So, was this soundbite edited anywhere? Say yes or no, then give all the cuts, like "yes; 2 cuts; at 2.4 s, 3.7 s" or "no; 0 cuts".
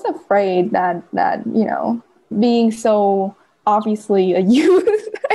yes; 2 cuts; at 2.3 s, 3.5 s